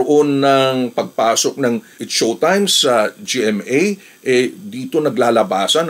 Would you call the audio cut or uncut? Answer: cut